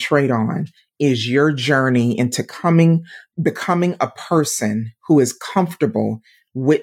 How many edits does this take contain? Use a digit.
0